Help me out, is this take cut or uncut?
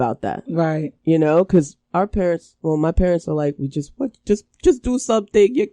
uncut